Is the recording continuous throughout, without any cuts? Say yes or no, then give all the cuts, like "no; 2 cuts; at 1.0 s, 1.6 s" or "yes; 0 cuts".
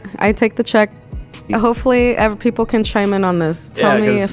no; 1 cut; at 1.5 s